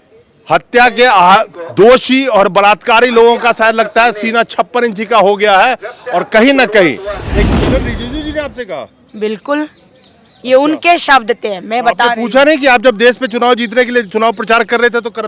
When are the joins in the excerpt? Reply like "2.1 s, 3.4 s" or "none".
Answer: 7.5 s